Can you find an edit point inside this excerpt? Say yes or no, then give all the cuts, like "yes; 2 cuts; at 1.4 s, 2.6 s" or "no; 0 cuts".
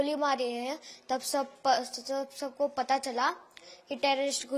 no; 0 cuts